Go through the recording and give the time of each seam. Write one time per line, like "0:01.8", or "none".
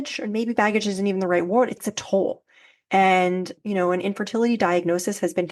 0:01.8
0:03.5